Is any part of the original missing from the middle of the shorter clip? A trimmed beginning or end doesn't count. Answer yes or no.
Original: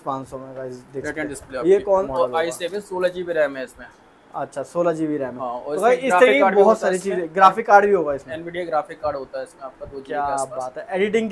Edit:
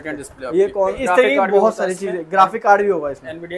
yes